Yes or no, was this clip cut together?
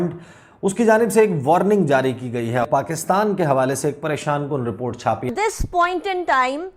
yes